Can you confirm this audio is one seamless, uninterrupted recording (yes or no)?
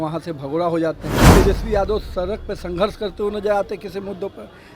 no